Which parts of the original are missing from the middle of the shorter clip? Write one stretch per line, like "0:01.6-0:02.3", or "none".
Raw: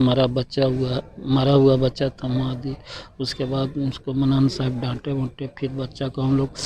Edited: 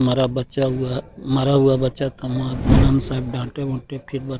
0:02.7-0:04.2